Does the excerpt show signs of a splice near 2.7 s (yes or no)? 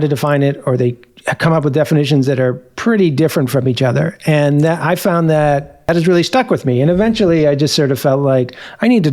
no